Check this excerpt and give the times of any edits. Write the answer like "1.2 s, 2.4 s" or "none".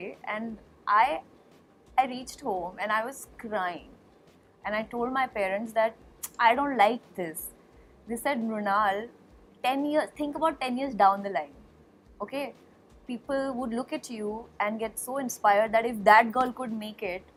none